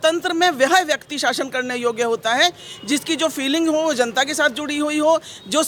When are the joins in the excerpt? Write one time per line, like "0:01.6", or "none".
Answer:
none